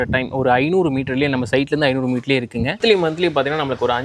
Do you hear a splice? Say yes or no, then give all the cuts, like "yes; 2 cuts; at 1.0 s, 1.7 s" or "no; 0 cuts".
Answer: yes; 1 cut; at 2.8 s